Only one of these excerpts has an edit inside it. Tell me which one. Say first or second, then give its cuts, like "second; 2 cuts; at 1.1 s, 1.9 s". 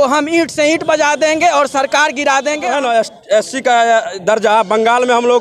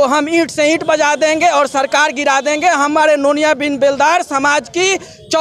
first; 1 cut; at 2.7 s